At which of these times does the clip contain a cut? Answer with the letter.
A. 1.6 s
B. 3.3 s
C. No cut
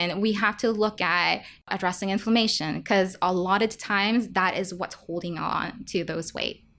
A